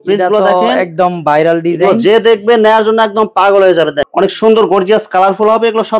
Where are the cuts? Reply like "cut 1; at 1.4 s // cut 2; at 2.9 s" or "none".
cut 1; at 4.0 s